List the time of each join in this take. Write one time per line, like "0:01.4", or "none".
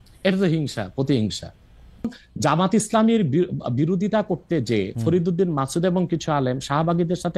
0:02.1